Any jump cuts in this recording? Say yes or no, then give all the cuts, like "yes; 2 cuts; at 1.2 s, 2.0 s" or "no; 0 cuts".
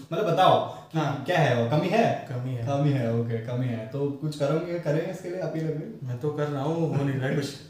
no; 0 cuts